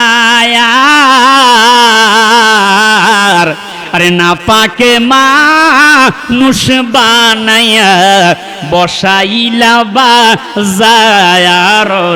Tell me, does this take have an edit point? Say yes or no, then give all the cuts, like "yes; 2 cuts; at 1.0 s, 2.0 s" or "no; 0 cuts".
no; 0 cuts